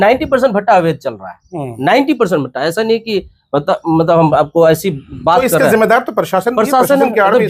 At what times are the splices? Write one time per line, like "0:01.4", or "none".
none